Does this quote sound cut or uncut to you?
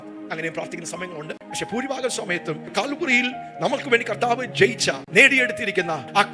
uncut